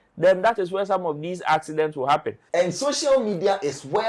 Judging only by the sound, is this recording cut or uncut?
cut